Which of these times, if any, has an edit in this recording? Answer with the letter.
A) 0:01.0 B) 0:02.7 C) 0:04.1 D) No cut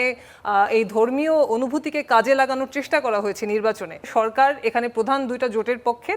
C